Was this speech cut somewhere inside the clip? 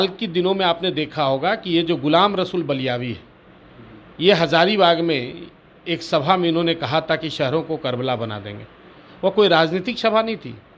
no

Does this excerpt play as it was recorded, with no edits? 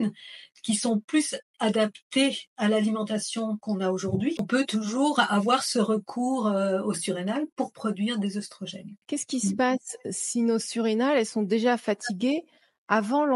no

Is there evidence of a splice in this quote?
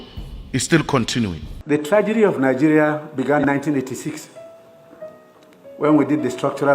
yes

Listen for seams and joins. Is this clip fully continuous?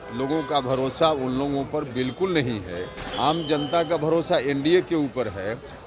no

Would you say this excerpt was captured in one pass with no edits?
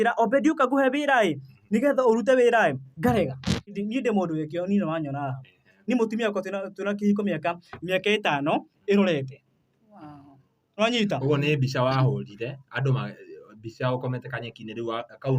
no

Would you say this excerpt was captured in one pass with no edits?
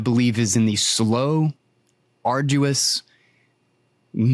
yes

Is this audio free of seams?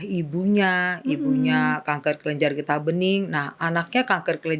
yes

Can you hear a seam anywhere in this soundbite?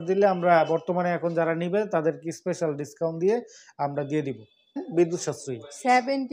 yes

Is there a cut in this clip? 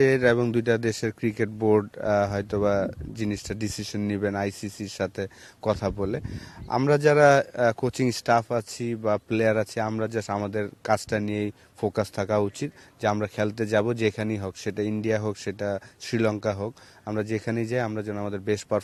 no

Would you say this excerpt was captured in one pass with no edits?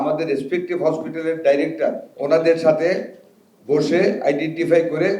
no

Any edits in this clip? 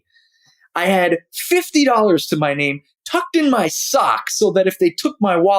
no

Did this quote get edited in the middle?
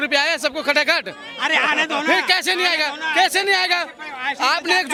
no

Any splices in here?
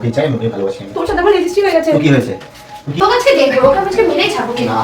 yes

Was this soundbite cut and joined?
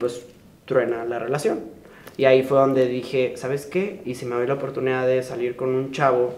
no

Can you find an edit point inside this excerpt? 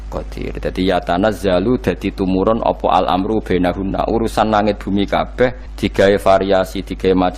yes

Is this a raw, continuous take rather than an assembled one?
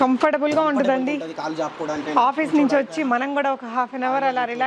yes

